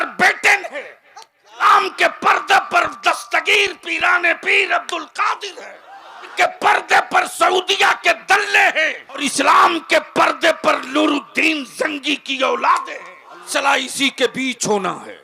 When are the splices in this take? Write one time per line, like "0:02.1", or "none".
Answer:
0:01.6
0:06.3
0:09.2
0:13.5